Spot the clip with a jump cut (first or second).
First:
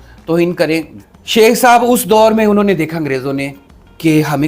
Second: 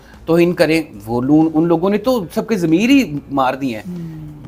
first